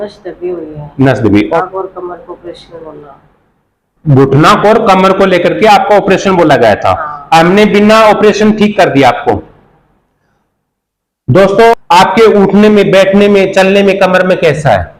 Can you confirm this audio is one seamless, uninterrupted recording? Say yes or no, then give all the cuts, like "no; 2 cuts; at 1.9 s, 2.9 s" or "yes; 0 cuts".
no; 2 cuts; at 1.6 s, 11.7 s